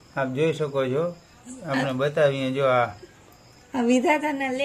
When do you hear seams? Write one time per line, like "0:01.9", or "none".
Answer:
none

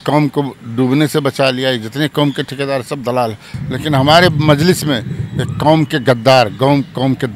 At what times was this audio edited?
0:03.5

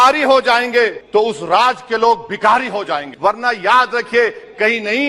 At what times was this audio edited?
0:01.0
0:03.0

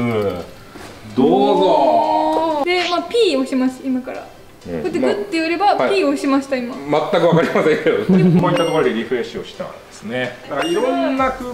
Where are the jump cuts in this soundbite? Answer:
0:02.6
0:08.4
0:10.4

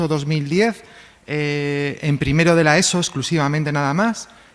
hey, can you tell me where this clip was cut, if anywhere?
0:01.9

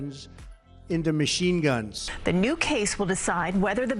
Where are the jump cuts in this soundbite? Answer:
0:02.0

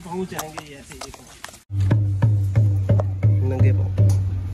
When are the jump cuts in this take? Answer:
0:01.8

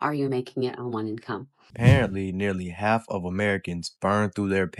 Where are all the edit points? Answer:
0:01.6

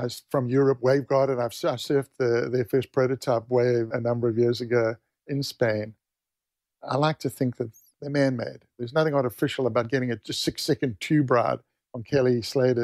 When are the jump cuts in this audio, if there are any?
0:03.9

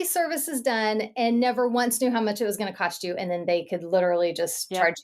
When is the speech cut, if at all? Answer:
none

